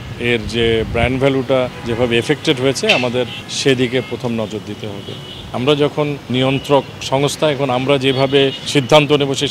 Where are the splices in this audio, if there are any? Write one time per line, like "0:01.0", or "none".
0:01.8
0:03.4
0:05.5
0:06.3
0:08.7